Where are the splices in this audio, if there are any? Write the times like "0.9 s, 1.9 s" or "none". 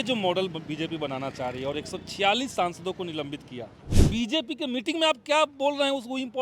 4.0 s